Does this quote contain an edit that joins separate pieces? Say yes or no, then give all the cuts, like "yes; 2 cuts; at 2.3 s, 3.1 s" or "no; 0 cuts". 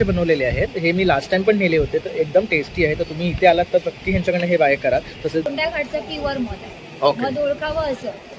yes; 1 cut; at 5.5 s